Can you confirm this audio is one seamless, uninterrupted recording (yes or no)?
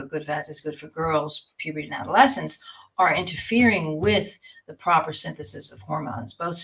yes